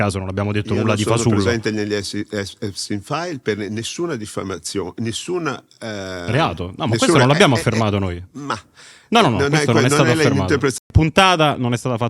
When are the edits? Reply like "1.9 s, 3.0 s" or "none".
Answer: 10.8 s